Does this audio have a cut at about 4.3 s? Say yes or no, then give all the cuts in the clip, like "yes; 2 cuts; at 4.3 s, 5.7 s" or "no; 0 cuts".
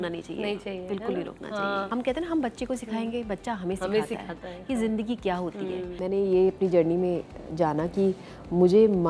no; 2 cuts; at 1.9 s, 6.0 s